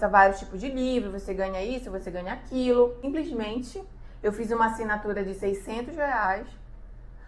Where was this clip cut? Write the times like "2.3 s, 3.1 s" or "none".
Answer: 3.0 s

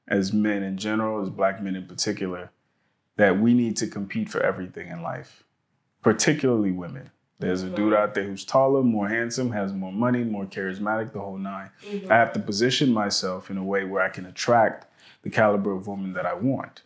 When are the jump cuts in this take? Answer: none

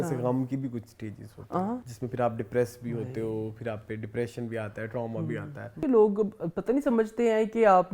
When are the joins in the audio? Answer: 1.9 s, 5.7 s

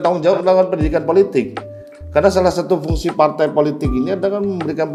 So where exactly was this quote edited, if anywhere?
none

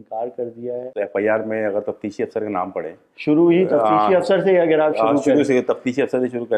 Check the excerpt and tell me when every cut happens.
0.9 s

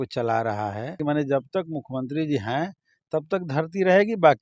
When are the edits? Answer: 1.0 s

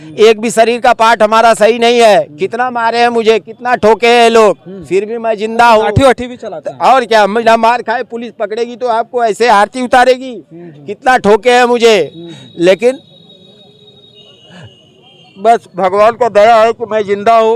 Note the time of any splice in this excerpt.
none

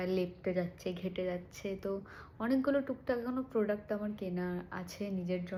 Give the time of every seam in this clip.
none

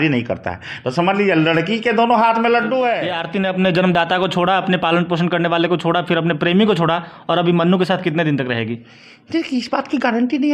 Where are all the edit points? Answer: 3.2 s

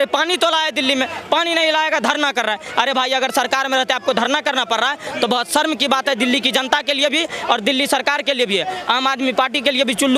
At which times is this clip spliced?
none

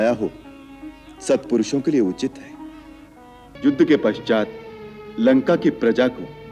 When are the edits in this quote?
3.5 s

